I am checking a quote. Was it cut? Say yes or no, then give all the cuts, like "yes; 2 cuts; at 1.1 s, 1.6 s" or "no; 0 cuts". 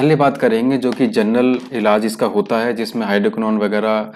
no; 0 cuts